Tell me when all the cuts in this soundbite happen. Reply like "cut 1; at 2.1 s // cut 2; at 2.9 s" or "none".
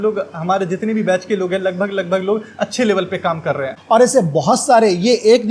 cut 1; at 3.7 s